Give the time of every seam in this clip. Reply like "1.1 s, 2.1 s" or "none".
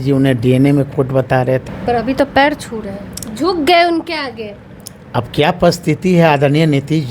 1.6 s